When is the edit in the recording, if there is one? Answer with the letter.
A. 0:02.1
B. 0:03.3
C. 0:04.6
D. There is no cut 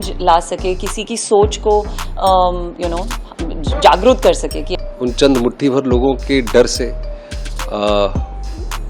C